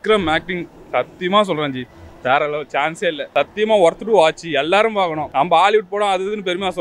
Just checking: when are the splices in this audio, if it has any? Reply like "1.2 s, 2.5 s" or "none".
3.2 s, 5.2 s

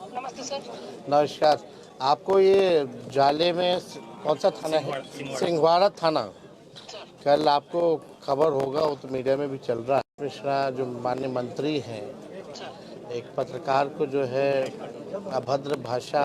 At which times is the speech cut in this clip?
10.1 s

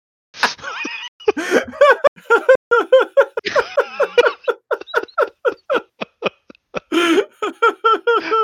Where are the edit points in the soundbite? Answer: 2.2 s

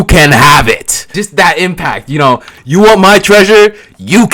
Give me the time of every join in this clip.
1.0 s, 2.5 s

